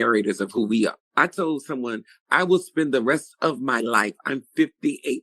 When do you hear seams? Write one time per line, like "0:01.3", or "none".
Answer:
0:01.0